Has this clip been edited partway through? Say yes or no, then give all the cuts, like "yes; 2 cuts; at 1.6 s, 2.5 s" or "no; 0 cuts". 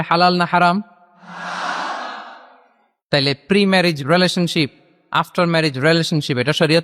no; 0 cuts